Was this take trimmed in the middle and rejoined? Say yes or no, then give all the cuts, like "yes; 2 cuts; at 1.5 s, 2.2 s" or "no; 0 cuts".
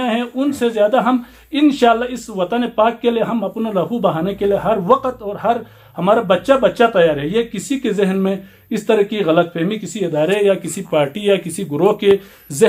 no; 0 cuts